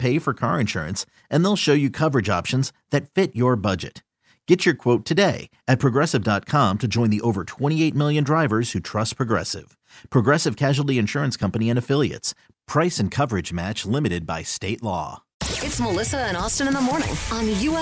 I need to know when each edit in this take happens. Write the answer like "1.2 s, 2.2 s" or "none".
15.4 s